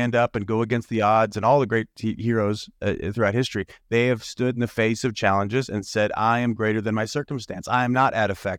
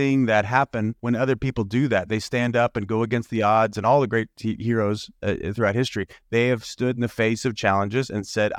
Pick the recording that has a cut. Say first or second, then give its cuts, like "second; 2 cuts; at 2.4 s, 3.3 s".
second; 1 cut; at 1.0 s